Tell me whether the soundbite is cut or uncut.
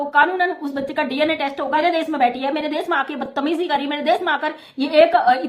cut